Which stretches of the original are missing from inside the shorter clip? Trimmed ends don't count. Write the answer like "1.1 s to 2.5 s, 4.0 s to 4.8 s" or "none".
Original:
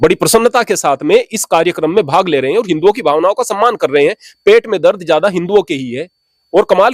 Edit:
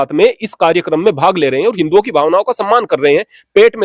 none

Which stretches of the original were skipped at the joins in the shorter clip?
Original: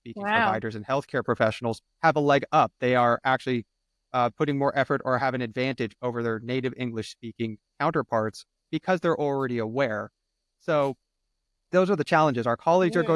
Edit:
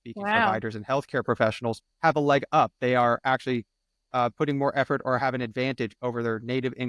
none

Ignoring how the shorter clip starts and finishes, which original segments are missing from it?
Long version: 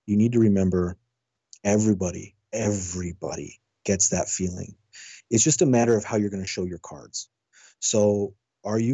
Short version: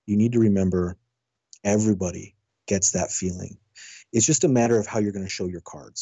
2.4 s to 3.5 s

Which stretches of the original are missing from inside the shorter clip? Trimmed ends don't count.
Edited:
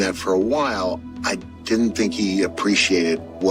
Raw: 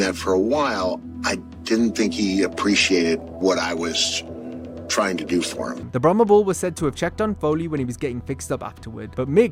none

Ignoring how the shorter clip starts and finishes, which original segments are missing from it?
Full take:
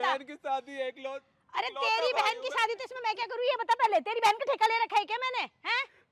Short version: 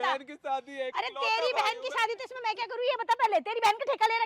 0.9 s to 1.5 s

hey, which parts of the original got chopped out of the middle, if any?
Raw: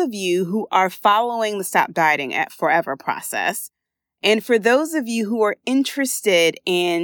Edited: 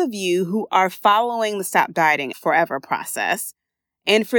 2.3 s to 2.5 s

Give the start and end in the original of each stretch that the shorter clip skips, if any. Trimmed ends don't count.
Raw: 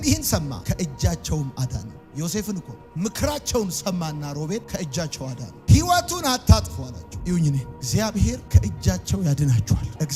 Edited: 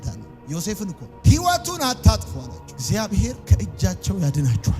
2.8 s to 5.5 s, 7.1 s to 7.7 s

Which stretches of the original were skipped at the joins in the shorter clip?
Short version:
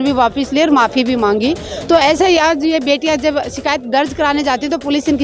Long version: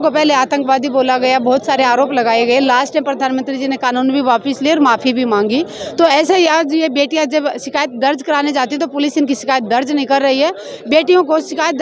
none

